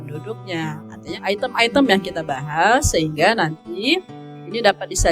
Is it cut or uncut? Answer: cut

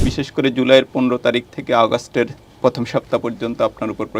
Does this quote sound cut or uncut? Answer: uncut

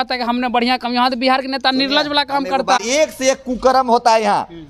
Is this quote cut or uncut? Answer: cut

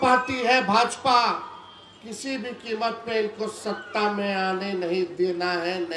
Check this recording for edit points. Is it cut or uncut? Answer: uncut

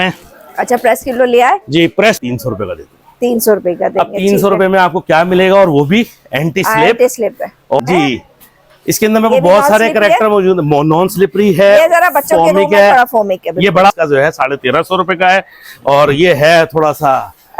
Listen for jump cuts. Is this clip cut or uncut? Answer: cut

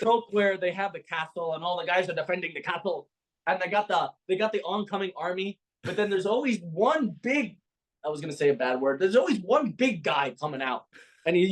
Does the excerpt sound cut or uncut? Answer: uncut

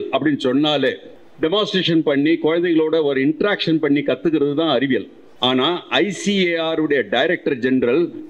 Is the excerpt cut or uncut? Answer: cut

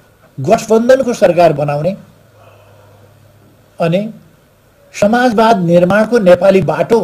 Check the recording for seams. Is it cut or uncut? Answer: uncut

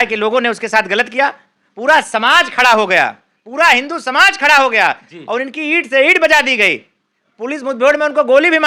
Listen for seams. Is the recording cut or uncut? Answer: uncut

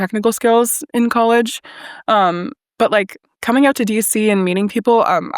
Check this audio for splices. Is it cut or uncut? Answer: uncut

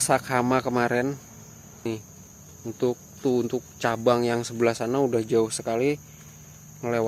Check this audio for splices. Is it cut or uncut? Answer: cut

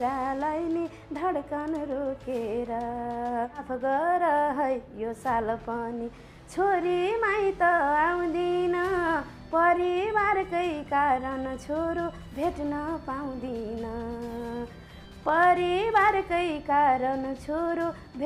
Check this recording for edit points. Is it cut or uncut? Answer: cut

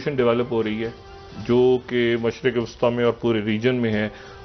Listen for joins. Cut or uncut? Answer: uncut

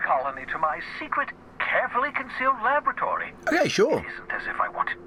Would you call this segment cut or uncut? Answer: uncut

